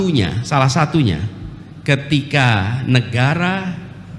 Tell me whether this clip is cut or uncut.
uncut